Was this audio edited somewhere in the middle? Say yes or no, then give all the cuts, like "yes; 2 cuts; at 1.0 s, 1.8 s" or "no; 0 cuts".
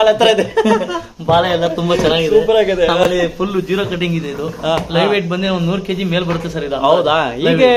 no; 0 cuts